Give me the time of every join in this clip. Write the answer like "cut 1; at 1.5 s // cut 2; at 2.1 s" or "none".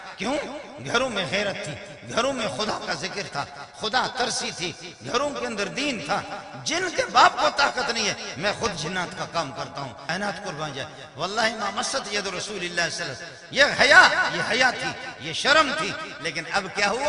cut 1; at 10.0 s